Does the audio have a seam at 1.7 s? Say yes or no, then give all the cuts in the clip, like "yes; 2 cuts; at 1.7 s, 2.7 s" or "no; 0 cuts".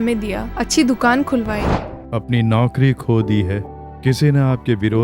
yes; 1 cut; at 1.7 s